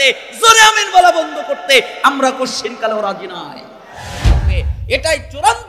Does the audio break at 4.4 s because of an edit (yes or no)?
yes